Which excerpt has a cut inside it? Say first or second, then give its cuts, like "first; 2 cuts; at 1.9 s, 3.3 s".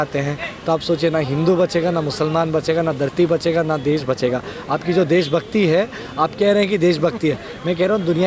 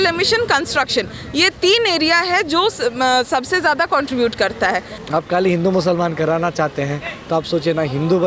second; 1 cut; at 5.0 s